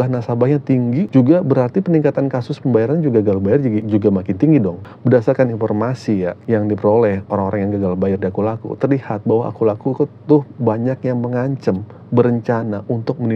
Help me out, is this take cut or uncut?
cut